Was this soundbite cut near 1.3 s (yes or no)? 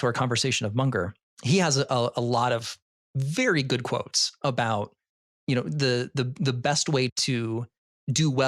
yes